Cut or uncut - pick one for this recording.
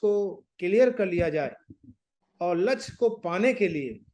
uncut